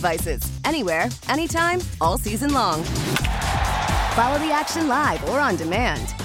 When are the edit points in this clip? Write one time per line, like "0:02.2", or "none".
none